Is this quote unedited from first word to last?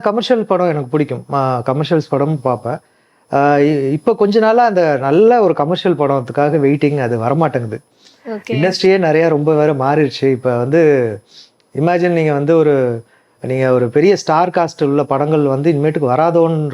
yes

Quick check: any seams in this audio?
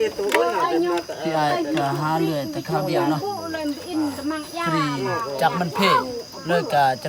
no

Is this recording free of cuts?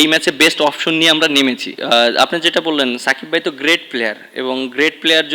no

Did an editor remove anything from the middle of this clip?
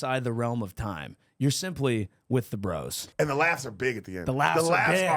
yes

